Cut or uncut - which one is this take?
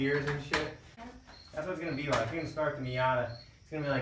cut